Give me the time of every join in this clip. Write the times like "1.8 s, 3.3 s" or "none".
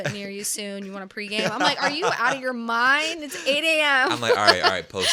none